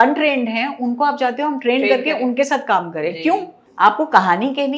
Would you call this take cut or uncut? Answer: cut